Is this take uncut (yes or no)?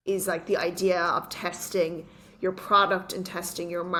yes